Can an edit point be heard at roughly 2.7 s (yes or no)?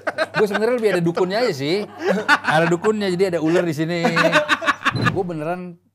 no